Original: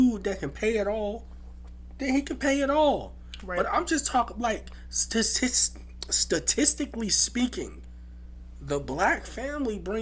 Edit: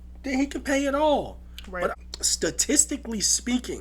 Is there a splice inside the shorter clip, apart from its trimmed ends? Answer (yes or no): yes